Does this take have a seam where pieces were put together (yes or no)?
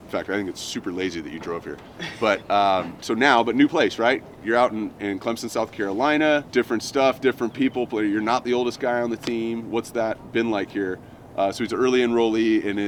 no